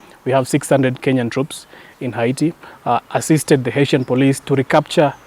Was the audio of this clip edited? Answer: yes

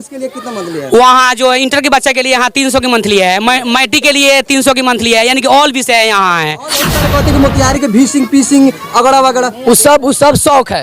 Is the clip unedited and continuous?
no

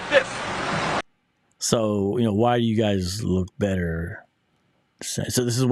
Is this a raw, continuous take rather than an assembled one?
yes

